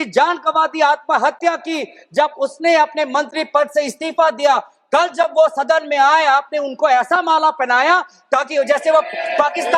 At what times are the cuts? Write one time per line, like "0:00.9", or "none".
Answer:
none